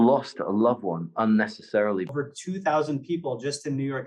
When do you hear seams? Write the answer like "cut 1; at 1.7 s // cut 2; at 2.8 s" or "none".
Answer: cut 1; at 2.1 s